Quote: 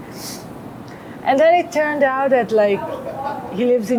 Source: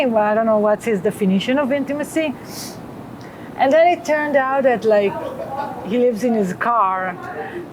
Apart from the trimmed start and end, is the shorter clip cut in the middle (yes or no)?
no